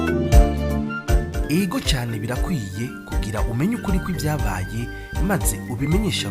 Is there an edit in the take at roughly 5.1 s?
no; 1 cut; at 1.1 s

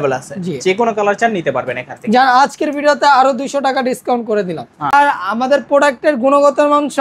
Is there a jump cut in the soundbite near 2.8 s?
no; 1 cut; at 4.9 s

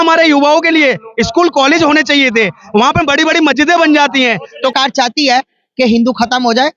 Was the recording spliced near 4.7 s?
yes; 1 cut; at 4.7 s

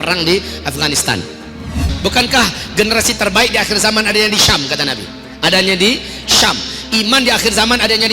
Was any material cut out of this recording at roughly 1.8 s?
yes; 1 cut; at 1.8 s

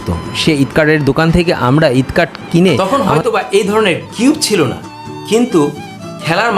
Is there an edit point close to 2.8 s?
yes; 1 cut; at 2.8 s

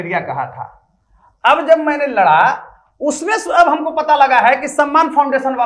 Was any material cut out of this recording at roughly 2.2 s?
no; 0 cuts

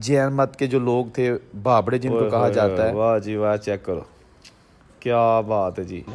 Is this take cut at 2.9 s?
yes; 1 cut; at 2.9 s

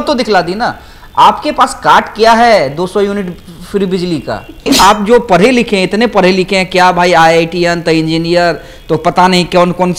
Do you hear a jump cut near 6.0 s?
no; 1 cut; at 4.6 s

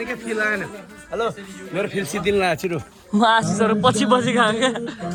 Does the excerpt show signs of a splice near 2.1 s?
no; 0 cuts

